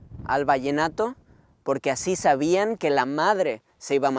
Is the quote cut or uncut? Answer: uncut